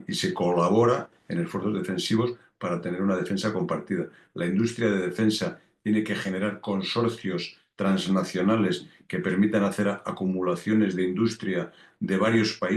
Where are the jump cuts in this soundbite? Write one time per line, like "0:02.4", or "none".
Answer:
0:04.2